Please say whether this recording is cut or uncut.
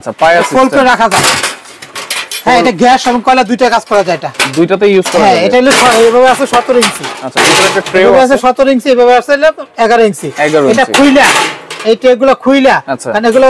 uncut